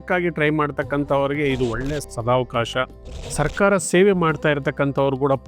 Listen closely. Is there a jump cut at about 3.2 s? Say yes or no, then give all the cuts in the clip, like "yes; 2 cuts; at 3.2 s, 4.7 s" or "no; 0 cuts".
yes; 1 cut; at 3.2 s